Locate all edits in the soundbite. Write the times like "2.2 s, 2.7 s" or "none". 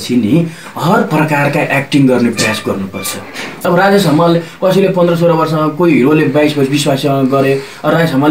3.6 s